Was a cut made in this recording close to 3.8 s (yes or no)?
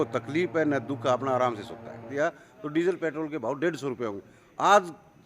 no